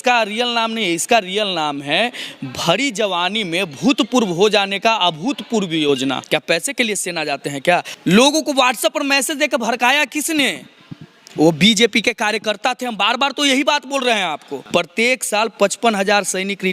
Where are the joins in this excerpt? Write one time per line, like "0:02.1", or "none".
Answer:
0:06.2
0:07.9
0:14.5

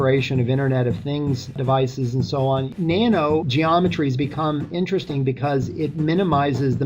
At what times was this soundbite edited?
0:02.7
0:03.5

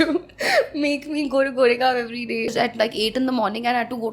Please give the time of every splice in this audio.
0:02.5

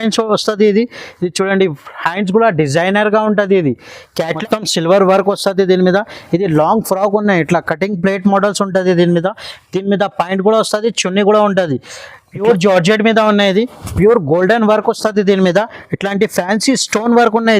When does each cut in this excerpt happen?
0:04.2
0:12.4

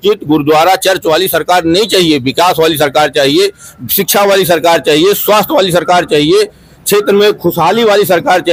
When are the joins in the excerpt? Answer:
none

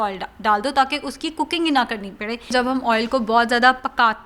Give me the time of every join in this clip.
0:02.5

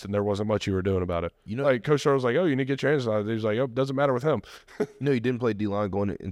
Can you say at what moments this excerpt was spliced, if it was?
none

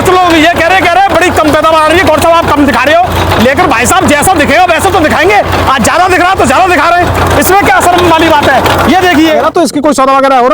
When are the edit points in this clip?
0:09.5

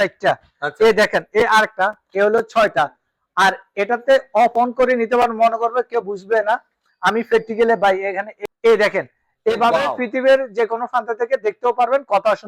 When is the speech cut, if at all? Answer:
0:08.3

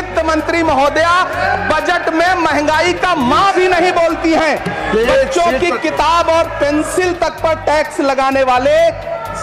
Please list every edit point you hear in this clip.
none

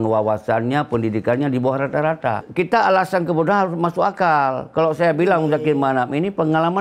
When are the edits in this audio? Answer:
0:02.4

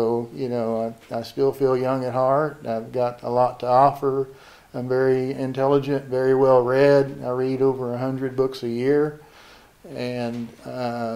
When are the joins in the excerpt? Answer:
none

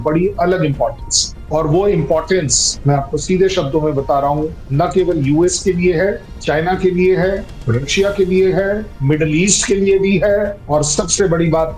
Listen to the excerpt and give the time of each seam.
none

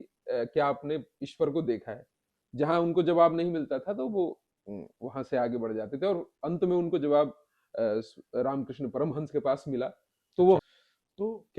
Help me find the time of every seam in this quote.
0:10.6

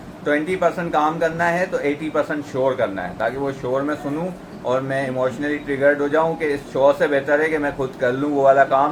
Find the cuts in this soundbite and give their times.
none

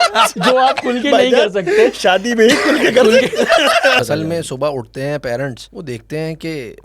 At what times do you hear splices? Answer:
0:04.0
0:05.7

